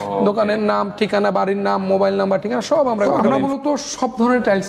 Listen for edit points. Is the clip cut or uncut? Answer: cut